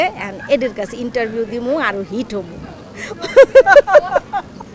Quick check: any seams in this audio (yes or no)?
no